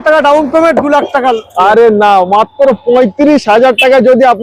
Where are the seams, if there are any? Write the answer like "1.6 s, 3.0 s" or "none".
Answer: none